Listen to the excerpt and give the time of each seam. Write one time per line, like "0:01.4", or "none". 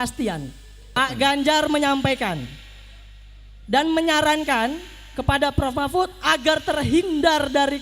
0:01.0